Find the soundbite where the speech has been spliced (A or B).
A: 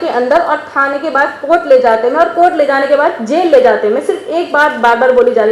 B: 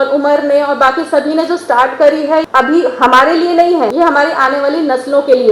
B